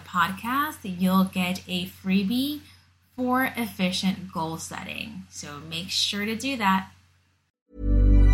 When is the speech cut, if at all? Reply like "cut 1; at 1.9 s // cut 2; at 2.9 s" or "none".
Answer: cut 1; at 7.4 s